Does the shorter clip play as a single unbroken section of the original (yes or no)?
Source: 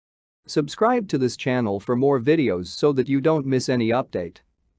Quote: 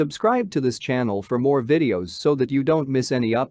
yes